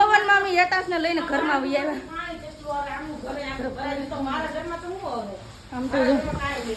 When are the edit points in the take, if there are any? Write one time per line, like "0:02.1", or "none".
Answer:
none